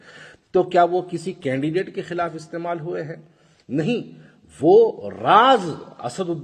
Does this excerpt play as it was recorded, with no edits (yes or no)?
yes